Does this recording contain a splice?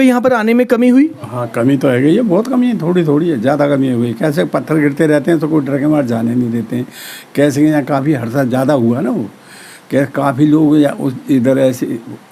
no; 0 cuts

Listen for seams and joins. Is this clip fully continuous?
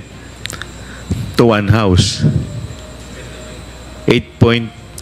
yes; 0 cuts

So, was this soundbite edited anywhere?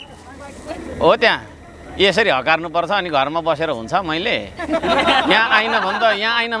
no; 0 cuts

